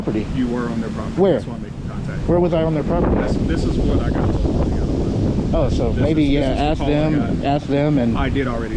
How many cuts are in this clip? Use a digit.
0